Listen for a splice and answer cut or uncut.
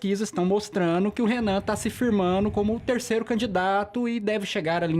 uncut